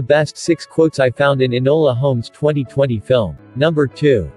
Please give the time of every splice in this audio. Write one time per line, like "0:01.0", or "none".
0:03.4